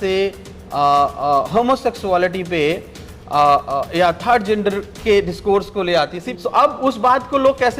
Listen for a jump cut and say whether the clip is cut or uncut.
cut